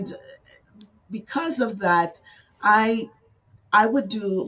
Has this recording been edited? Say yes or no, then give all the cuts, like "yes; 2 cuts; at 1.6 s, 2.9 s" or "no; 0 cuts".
no; 0 cuts